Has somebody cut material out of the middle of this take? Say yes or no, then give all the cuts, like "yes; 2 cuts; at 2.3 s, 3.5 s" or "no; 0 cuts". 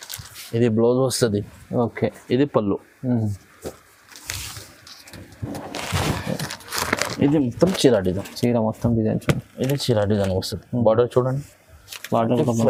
no; 0 cuts